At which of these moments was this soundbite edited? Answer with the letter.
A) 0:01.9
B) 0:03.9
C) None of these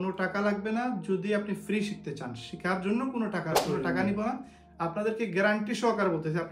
B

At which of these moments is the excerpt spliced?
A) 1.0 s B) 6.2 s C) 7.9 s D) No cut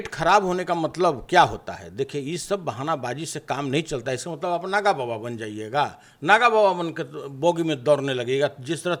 D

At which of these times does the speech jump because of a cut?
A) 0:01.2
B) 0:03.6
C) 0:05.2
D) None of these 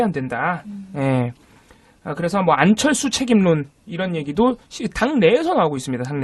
C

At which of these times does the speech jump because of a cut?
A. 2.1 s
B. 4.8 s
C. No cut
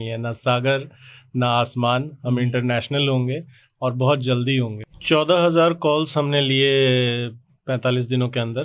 B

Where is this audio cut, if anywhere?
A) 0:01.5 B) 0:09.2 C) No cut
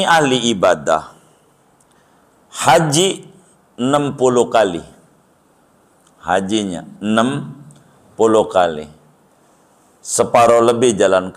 C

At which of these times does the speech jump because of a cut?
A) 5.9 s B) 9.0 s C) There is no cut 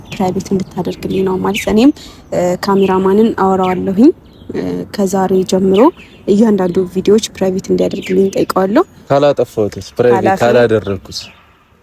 B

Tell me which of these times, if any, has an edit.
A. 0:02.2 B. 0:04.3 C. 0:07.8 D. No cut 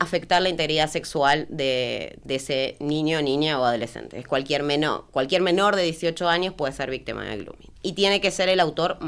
D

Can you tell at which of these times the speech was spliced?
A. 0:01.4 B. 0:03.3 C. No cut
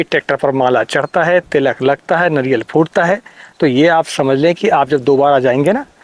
C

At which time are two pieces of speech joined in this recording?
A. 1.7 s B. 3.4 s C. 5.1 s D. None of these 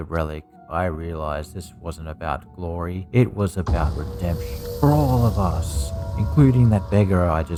D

